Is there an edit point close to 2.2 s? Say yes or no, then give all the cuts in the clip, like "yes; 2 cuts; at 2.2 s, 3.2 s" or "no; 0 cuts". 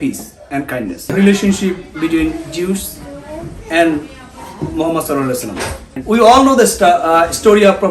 no; 2 cuts; at 1.0 s, 6.0 s